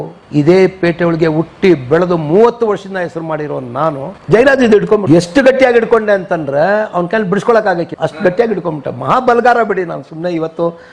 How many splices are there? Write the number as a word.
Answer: three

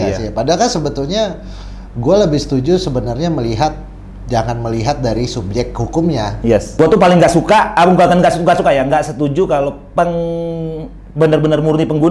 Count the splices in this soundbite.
one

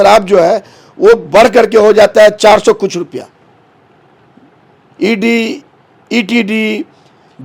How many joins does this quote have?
zero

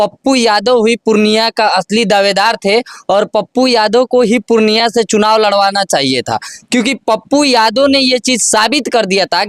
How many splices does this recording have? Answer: zero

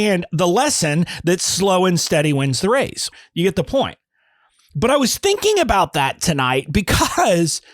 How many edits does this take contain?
one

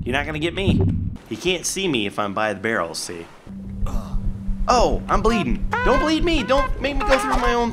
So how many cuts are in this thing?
two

